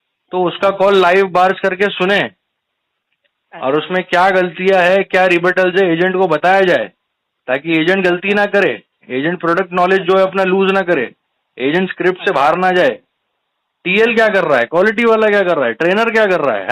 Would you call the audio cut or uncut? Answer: uncut